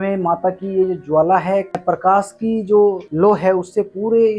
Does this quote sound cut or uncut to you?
cut